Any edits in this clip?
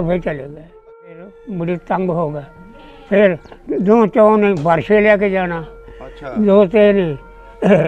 yes; 1 cut; at 1.3 s

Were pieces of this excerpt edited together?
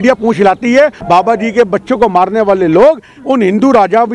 yes; 1 cut; at 1.0 s

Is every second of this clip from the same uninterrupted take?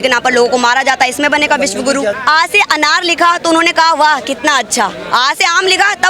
no; 1 cut; at 2.2 s

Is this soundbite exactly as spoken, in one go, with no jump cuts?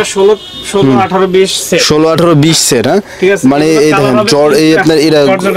yes; 0 cuts

